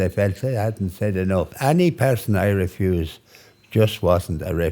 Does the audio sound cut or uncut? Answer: cut